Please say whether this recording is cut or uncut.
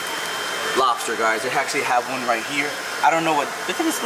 uncut